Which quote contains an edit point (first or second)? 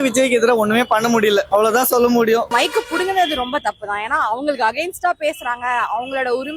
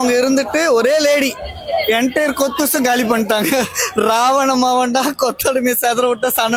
first